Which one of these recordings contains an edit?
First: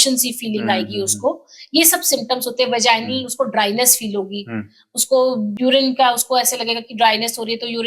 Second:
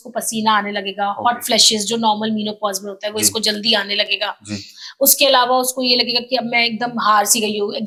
first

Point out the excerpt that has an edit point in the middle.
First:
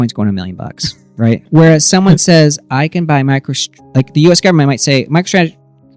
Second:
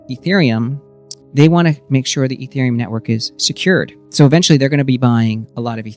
first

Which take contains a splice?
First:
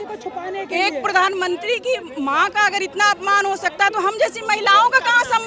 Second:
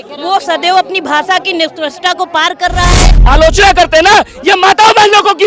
second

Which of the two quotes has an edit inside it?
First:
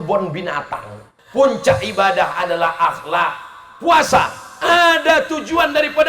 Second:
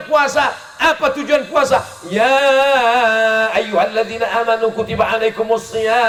first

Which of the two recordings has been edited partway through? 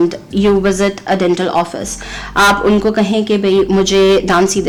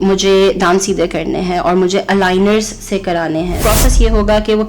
second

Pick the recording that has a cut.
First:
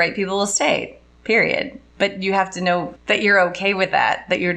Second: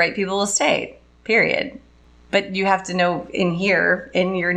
first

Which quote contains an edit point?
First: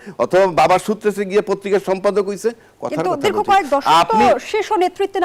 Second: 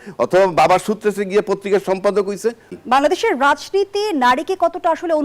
second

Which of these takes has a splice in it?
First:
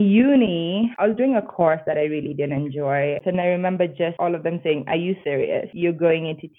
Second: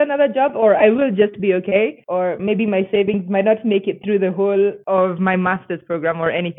first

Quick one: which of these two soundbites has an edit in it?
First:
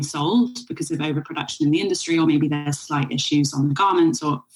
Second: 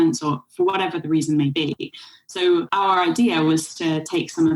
second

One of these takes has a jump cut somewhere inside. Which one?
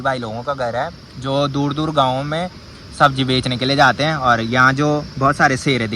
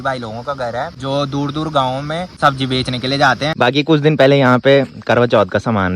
second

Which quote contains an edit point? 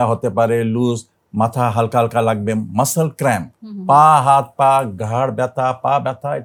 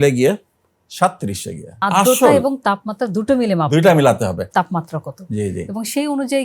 second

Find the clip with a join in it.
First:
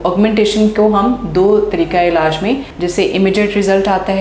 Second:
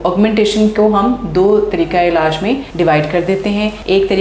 first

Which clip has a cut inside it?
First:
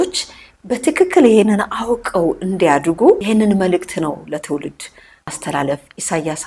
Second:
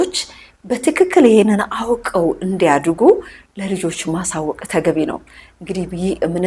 first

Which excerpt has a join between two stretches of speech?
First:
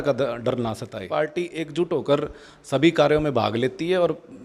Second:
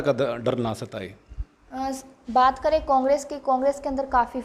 first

